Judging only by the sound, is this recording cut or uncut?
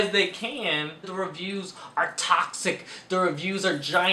cut